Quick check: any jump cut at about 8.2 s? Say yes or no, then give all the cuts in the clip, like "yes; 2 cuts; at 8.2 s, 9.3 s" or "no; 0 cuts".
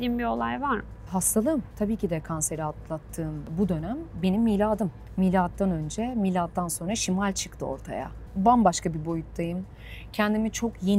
yes; 5 cuts; at 1.0 s, 1.7 s, 3.5 s, 5.0 s, 8.2 s